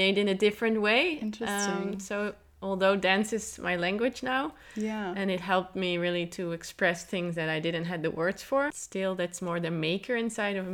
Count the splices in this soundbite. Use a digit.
1